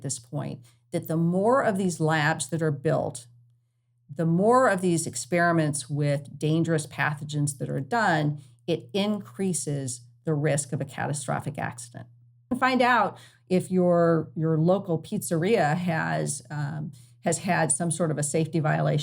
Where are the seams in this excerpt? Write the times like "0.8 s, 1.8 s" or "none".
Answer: 12.5 s